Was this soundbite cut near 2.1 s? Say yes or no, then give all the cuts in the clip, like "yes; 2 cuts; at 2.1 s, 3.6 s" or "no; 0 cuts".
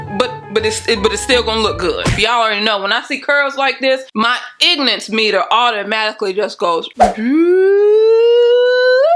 yes; 1 cut; at 2.1 s